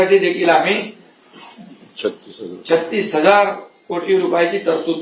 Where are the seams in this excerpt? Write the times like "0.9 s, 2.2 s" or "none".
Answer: none

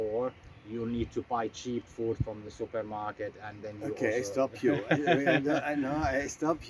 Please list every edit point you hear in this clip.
none

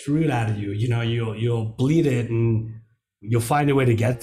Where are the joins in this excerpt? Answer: 3.2 s

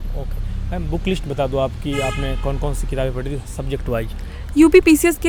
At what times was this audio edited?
none

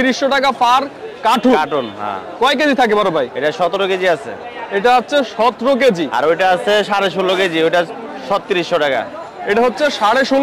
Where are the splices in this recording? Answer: none

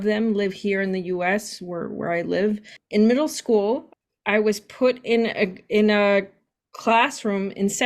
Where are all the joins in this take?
2.8 s, 3.9 s

